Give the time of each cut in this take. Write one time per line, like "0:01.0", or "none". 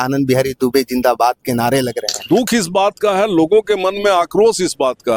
0:02.1